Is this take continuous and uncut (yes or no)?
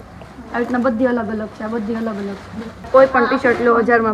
no